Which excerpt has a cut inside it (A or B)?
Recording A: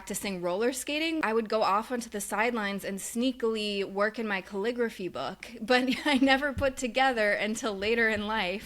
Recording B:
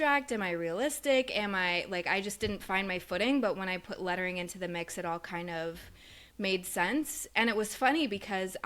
A